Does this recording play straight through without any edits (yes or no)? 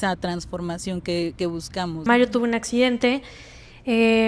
no